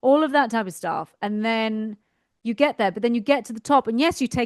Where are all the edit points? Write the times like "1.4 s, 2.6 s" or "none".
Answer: none